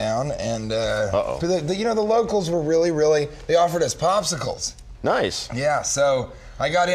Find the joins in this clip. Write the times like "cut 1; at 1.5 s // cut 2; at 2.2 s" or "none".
cut 1; at 3.5 s